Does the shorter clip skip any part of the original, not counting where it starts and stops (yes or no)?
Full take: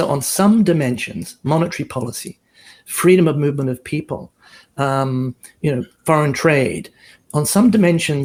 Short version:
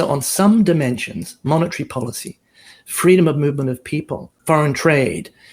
yes